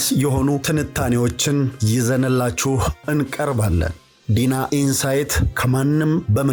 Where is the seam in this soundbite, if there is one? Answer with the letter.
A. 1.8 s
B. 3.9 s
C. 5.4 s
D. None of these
D